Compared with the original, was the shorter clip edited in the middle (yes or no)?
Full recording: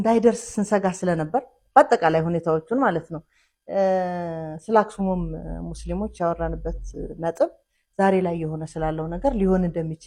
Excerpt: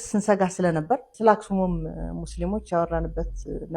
yes